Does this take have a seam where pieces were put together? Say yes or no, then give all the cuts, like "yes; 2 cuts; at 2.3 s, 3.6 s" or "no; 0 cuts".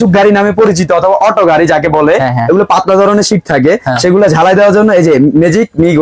no; 0 cuts